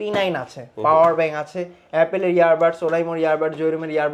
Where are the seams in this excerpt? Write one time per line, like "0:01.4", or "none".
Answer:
none